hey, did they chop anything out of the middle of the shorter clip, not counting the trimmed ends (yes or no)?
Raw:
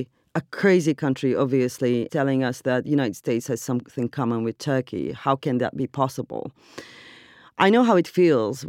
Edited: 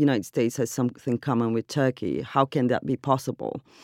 no